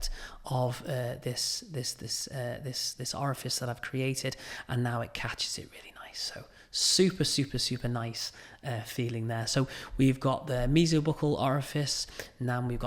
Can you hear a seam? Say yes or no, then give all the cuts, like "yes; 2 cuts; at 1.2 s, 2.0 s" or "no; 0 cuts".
no; 0 cuts